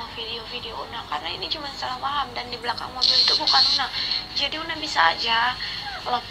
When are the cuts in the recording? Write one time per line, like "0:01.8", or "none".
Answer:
none